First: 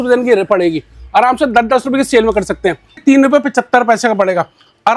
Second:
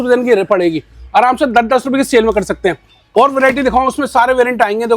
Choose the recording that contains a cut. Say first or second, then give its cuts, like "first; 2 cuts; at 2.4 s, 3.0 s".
first; 1 cut; at 3.0 s